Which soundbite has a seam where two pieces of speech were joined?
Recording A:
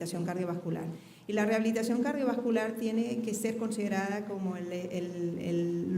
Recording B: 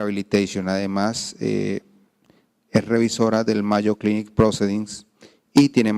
A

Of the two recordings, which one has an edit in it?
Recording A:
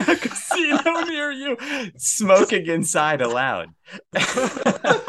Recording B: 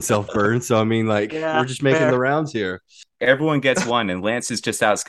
B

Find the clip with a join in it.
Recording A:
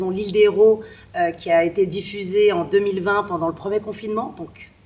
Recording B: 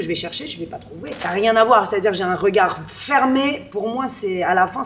B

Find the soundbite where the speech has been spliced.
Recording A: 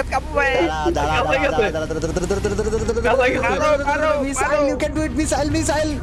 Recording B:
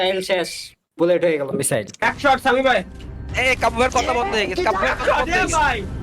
B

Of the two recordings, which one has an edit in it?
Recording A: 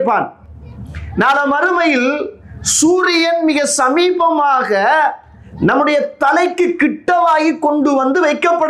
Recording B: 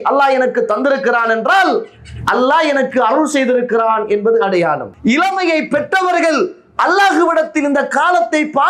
B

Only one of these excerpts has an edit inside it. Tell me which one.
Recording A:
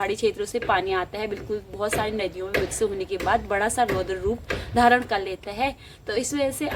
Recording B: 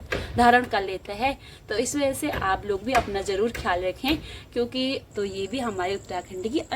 B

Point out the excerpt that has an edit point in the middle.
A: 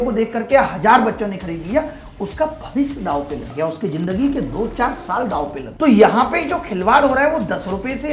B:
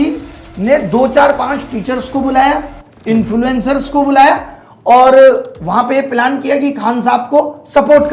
A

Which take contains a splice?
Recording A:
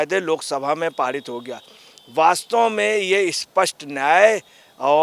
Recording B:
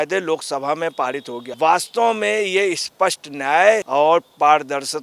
B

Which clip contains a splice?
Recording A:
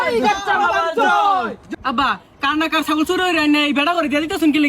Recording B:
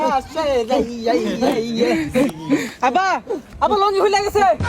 A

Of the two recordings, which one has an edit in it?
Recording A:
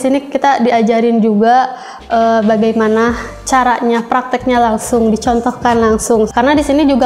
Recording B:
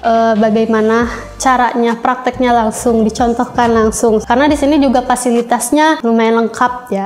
B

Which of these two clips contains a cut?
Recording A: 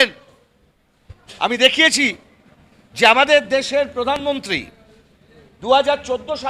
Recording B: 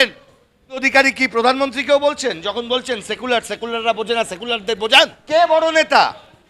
B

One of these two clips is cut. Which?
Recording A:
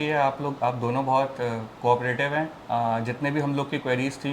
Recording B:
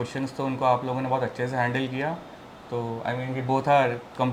A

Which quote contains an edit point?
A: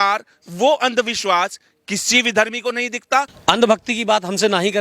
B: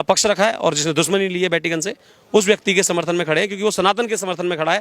A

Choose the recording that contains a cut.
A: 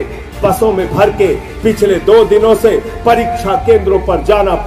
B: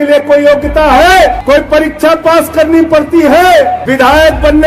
B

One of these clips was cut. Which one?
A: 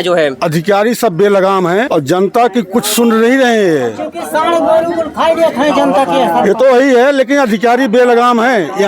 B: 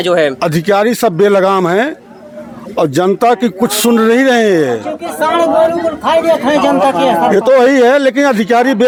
A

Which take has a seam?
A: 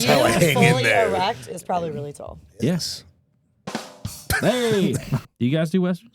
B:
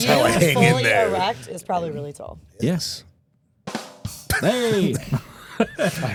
A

